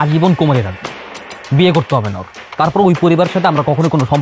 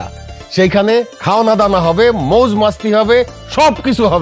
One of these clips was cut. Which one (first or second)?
second